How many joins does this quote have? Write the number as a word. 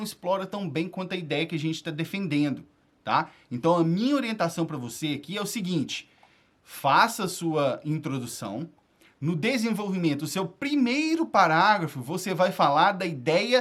zero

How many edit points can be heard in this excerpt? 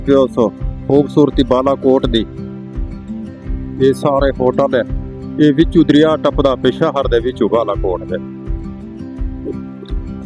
zero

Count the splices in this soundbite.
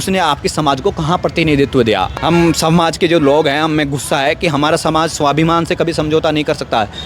one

